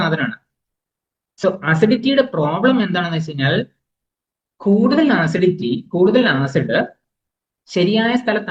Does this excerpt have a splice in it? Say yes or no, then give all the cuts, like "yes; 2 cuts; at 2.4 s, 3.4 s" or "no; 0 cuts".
no; 0 cuts